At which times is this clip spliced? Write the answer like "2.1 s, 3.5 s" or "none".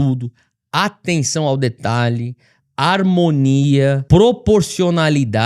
4.0 s